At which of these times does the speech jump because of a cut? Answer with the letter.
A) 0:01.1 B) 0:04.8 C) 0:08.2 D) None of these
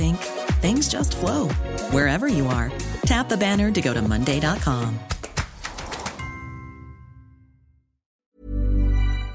C